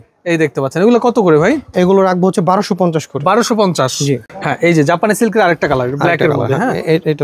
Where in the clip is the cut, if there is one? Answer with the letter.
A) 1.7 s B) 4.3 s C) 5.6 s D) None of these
B